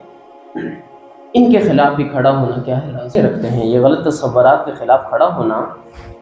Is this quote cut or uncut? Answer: cut